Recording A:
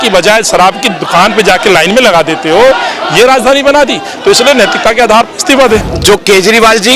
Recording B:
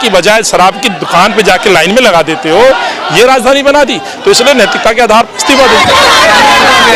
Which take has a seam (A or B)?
A